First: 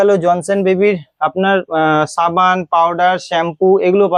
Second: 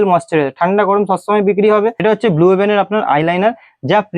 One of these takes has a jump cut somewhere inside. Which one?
second; 1 cut; at 2.0 s

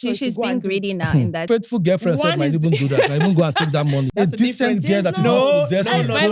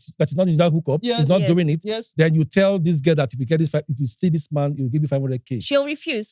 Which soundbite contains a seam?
first; 2 cuts; at 1.4 s, 4.1 s

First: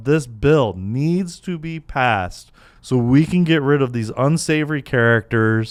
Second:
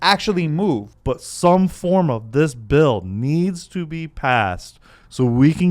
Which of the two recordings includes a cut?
second; 1 cut; at 0.9 s

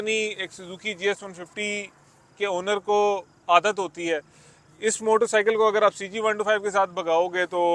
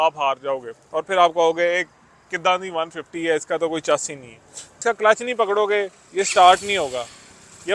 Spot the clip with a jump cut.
second; 1 cut; at 4.8 s

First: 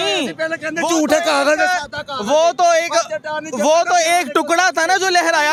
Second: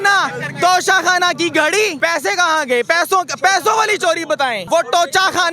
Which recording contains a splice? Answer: second; 2 cuts; at 1.9 s, 4.6 s

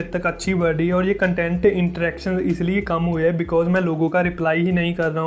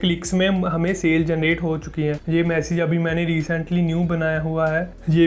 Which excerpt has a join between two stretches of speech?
second; 1 cut; at 2.2 s

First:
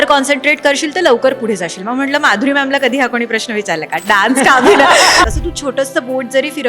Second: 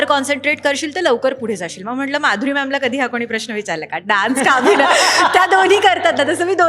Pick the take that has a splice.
first; 1 cut; at 5.2 s

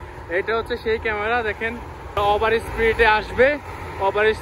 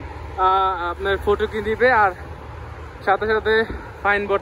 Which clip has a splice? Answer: first; 1 cut; at 2.2 s

